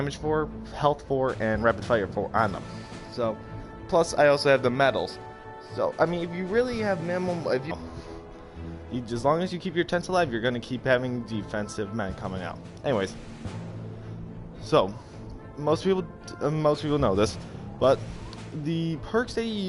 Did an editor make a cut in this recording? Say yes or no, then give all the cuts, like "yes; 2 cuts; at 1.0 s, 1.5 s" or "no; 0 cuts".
no; 0 cuts